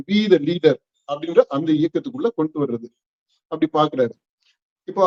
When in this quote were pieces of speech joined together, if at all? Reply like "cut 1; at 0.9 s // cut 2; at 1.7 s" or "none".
none

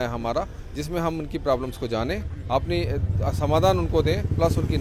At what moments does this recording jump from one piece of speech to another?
none

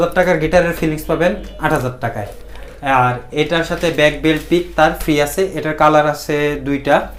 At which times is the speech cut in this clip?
none

